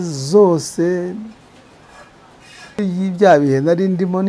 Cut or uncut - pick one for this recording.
cut